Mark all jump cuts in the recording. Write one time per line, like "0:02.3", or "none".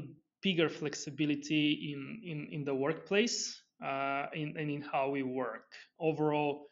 none